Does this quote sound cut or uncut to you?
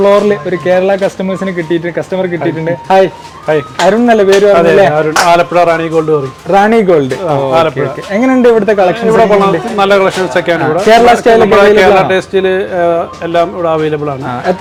uncut